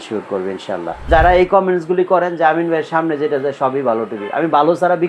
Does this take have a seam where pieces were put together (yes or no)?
yes